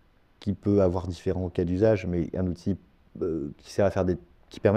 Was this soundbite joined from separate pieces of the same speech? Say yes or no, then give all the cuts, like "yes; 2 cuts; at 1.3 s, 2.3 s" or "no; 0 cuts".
no; 0 cuts